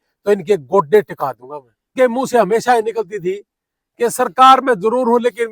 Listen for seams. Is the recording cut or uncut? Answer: cut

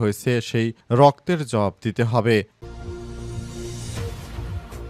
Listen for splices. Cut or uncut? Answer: cut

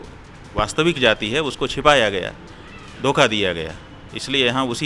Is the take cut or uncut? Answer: uncut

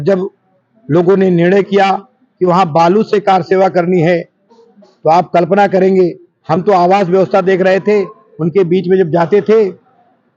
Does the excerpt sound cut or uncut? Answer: uncut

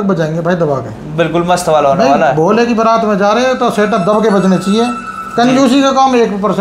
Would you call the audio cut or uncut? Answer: uncut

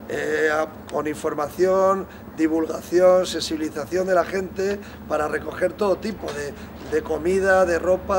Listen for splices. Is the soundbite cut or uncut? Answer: uncut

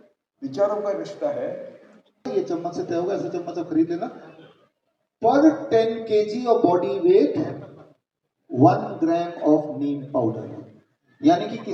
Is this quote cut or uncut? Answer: cut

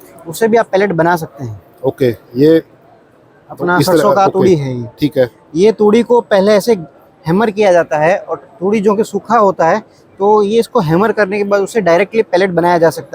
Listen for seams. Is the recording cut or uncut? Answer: uncut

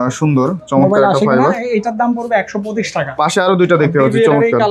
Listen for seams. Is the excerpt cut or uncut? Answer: uncut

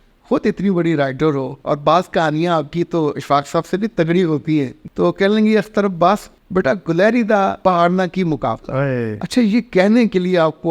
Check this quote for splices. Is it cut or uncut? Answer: cut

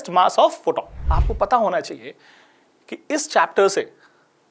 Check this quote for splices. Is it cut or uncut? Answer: cut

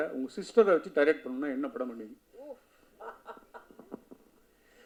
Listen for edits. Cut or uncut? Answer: uncut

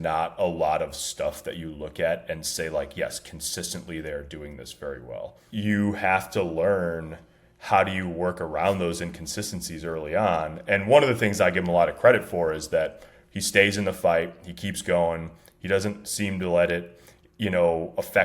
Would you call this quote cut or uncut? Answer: cut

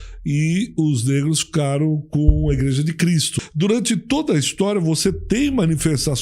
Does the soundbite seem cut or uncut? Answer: cut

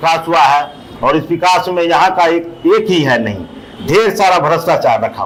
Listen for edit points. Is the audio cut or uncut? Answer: uncut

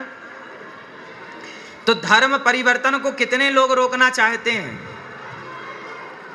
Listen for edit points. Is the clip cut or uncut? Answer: uncut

